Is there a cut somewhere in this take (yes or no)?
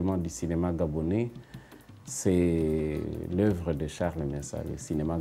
no